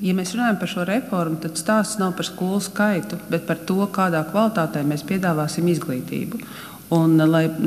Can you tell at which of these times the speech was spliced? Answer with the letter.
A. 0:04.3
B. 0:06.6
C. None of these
C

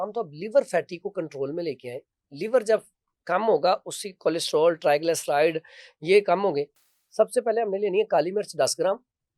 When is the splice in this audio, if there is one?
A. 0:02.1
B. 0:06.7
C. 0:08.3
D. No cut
B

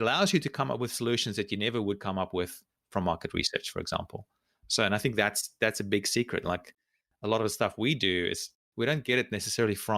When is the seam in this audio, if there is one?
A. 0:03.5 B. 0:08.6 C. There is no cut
B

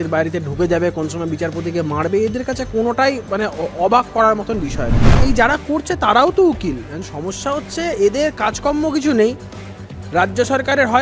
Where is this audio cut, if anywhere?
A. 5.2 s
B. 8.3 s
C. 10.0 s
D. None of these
A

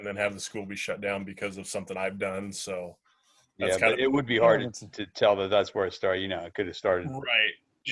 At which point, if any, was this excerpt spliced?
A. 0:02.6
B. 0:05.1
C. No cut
C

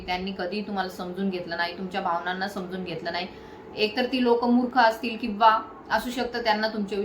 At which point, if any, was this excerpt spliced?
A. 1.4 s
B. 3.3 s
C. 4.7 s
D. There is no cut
D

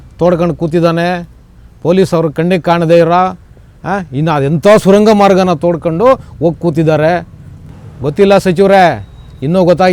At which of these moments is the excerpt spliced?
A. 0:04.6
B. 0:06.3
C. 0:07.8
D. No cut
C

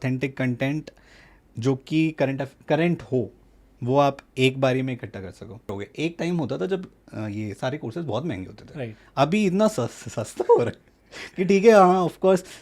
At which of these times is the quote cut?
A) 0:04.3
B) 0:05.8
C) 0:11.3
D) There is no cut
B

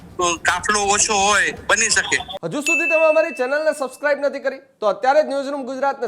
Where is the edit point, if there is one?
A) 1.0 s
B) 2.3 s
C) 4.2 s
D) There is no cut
B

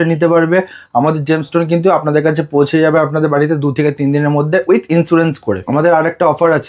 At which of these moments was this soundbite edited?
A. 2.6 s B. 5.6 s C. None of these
B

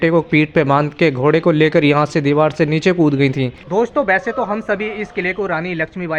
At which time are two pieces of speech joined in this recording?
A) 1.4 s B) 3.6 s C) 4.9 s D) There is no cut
B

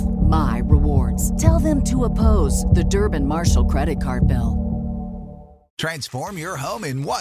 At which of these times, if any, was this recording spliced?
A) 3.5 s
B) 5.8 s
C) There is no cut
B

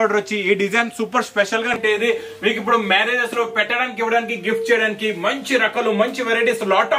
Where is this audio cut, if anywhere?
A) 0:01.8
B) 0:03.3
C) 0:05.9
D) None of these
A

